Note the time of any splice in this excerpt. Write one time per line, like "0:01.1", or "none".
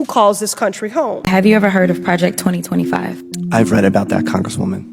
0:01.3